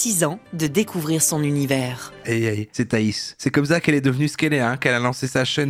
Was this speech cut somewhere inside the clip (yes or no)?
no